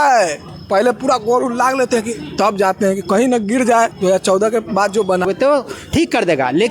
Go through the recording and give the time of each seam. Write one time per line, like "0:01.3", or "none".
0:05.2

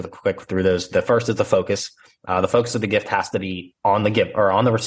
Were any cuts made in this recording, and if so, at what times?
none

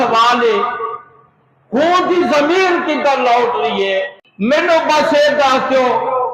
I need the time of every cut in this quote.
0:04.2

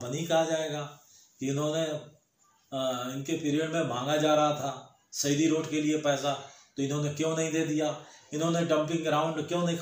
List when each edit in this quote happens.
none

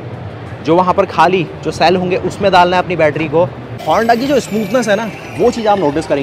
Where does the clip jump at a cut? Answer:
0:03.7

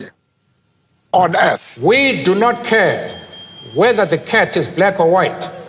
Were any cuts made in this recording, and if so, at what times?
0:01.7

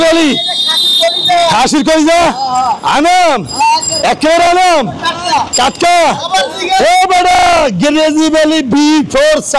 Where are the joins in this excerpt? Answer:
none

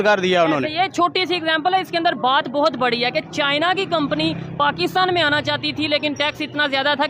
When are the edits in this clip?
none

